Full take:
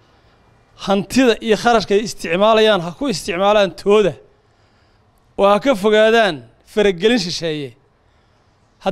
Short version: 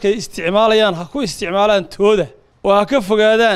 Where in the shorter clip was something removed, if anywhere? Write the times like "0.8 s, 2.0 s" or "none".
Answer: 2.4 s